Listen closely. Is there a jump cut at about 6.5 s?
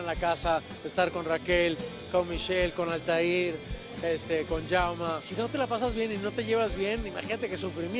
no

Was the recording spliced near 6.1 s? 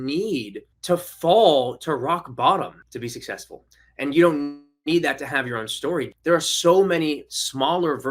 yes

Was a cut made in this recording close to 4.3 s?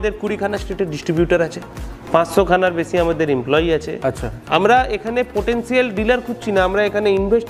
yes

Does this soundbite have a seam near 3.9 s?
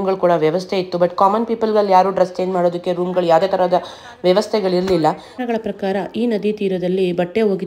no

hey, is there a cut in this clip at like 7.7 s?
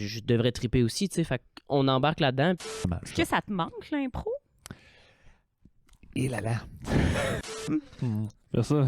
yes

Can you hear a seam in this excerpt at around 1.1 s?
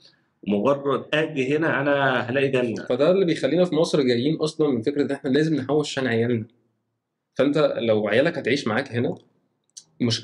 yes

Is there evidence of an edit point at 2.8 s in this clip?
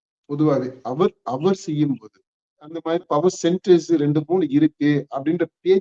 yes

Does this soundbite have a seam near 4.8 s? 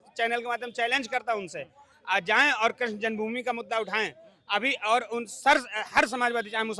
no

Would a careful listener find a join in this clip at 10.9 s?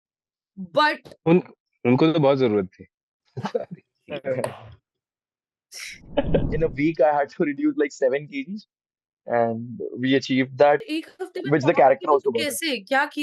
yes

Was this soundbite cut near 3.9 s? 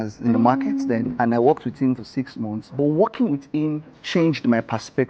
yes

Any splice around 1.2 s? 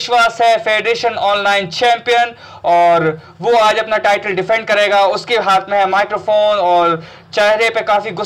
no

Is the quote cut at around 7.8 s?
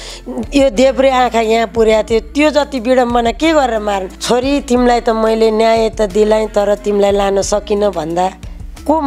no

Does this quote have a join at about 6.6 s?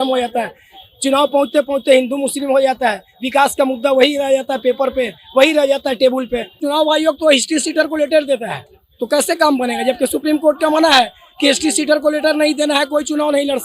yes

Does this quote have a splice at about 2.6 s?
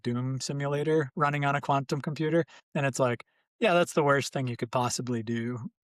yes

